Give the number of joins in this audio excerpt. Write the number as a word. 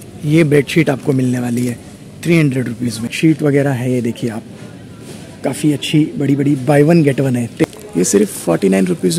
two